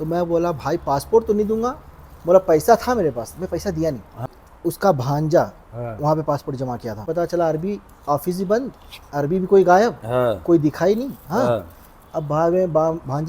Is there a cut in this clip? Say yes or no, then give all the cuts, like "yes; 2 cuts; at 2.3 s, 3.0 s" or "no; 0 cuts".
yes; 2 cuts; at 4.2 s, 7.1 s